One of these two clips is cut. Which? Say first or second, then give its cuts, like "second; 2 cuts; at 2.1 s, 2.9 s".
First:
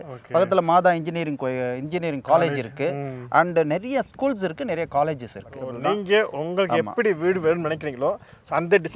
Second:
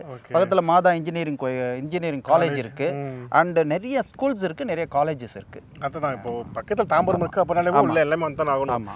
first; 1 cut; at 5.6 s